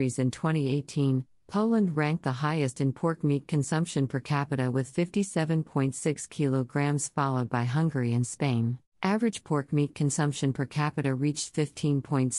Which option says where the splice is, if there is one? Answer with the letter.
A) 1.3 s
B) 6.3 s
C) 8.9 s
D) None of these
C